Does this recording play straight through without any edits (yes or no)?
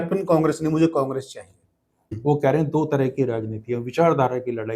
no